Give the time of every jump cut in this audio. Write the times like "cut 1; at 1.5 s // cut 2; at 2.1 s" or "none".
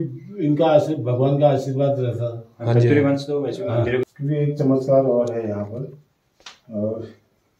cut 1; at 4.1 s

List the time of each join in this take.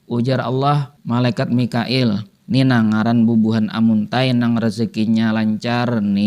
cut 1; at 0.9 s // cut 2; at 2.3 s

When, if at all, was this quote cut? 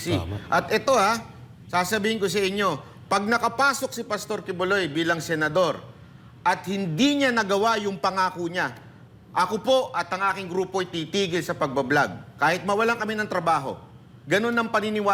none

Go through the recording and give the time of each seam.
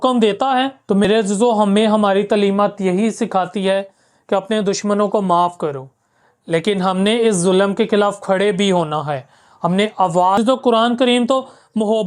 cut 1; at 1.0 s // cut 2; at 10.4 s

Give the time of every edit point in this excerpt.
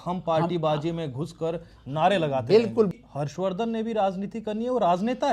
cut 1; at 2.9 s

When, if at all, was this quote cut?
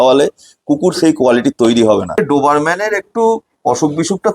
cut 1; at 2.2 s

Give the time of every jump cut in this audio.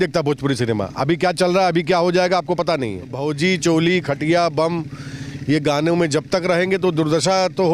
cut 1; at 3.1 s

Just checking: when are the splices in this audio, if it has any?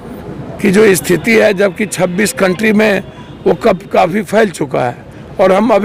none

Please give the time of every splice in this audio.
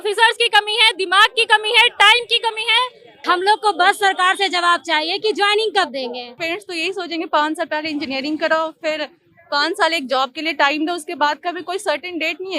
cut 1; at 3.1 s // cut 2; at 6.3 s

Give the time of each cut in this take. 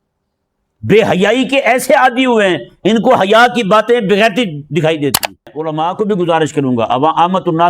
cut 1; at 5.6 s

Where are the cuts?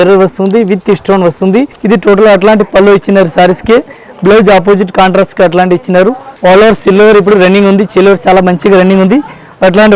cut 1; at 1.8 s // cut 2; at 6.3 s

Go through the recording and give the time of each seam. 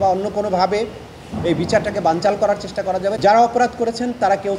cut 1; at 3.2 s

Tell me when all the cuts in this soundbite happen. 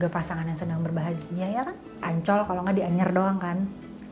cut 1; at 2.0 s

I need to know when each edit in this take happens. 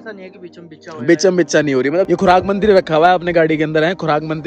cut 1; at 2.1 s

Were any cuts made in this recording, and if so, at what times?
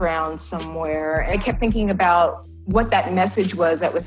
cut 1; at 1.3 s

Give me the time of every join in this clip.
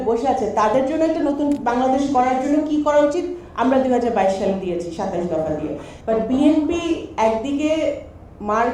cut 1; at 5.9 s

